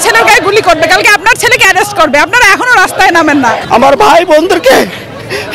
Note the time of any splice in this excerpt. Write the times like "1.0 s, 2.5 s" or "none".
3.6 s